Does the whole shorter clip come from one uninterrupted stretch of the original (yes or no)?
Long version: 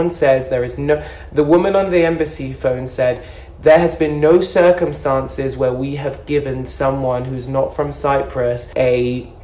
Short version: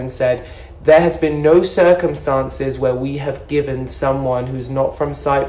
yes